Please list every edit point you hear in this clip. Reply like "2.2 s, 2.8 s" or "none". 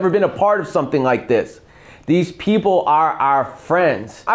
none